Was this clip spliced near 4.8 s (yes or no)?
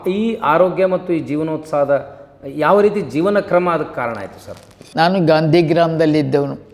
yes